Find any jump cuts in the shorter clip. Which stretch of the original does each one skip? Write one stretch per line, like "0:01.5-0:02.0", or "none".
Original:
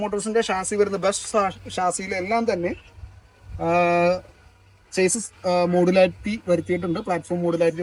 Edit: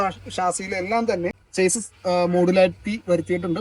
0:02.8-0:04.8